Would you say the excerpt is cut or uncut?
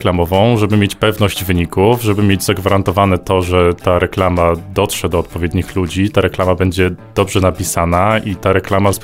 uncut